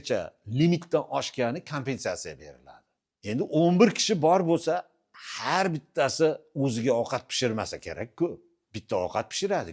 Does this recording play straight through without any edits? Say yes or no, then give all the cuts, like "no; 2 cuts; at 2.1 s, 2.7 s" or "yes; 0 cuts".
yes; 0 cuts